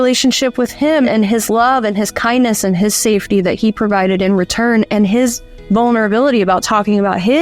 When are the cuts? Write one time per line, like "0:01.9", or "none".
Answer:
0:01.1